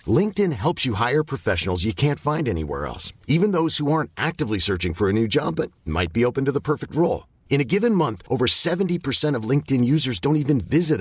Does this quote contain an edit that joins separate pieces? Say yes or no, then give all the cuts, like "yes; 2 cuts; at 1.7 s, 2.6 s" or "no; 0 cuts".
no; 0 cuts